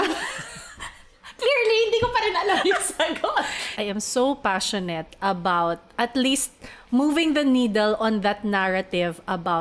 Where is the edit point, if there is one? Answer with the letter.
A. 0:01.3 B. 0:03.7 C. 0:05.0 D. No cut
B